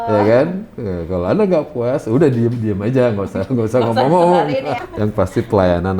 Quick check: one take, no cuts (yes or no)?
no